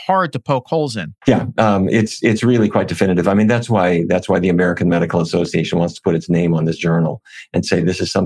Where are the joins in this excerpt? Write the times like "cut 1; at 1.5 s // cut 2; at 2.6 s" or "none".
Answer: none